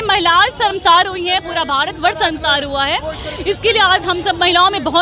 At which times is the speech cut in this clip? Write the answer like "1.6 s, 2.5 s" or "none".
none